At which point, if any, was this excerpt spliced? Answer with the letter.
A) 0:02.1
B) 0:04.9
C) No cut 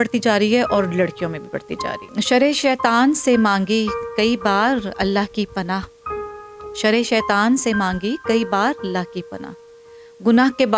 A